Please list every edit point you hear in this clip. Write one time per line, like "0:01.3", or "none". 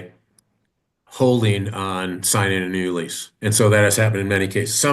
0:03.2